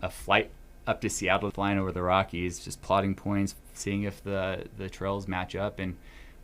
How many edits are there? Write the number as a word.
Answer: one